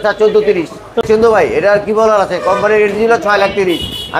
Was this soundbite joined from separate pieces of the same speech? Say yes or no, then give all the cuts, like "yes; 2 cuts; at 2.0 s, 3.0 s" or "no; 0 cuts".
yes; 1 cut; at 1.0 s